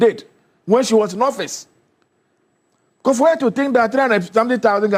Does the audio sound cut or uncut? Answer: uncut